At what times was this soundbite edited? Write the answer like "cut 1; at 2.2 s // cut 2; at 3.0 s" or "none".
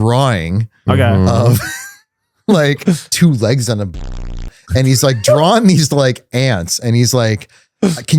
cut 1; at 3.1 s